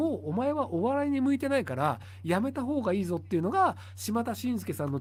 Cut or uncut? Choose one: uncut